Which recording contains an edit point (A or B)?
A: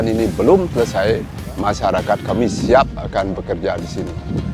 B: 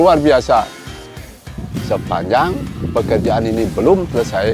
B